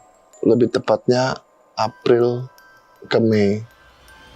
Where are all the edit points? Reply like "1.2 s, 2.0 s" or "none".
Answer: none